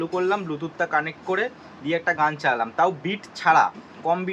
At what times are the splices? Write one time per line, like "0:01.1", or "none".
none